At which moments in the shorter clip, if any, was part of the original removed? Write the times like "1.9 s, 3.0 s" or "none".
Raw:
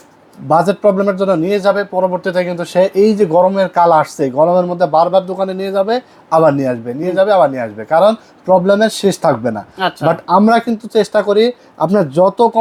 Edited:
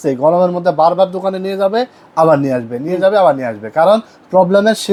none